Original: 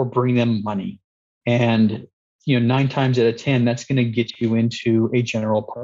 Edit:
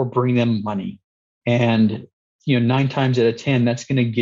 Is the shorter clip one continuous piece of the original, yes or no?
yes